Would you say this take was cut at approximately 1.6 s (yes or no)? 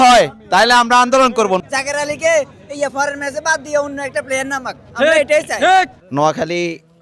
yes